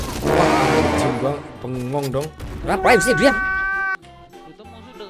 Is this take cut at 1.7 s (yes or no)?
no